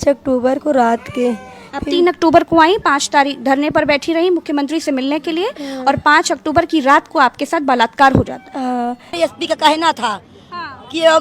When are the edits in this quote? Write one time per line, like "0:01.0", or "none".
0:09.1